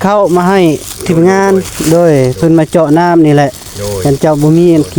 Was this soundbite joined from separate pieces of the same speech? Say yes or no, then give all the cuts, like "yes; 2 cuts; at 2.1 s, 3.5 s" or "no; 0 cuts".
no; 0 cuts